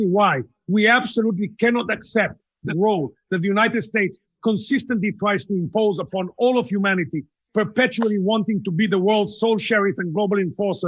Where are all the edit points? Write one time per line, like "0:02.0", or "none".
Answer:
0:02.7

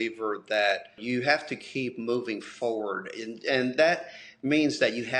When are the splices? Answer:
0:01.0

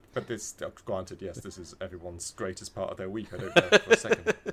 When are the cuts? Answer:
0:03.5

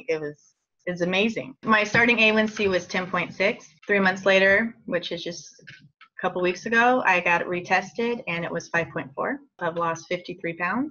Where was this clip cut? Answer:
0:01.6
0:09.5

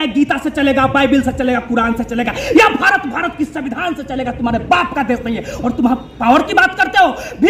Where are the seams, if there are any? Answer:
none

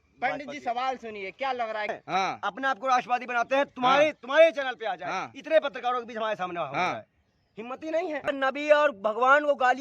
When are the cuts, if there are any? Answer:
0:02.0
0:08.3

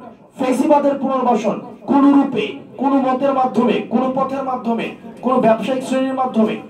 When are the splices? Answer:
none

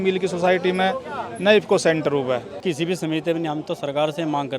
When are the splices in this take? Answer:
0:02.6

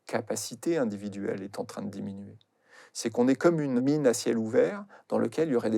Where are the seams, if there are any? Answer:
0:03.8

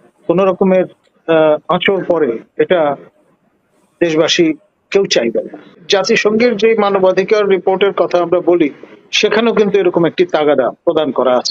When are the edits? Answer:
0:05.8

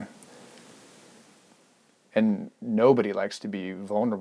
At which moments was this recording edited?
none

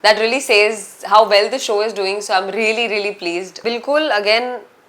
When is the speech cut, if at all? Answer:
0:03.5

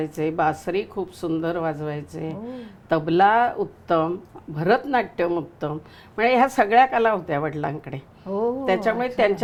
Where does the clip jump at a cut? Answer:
none

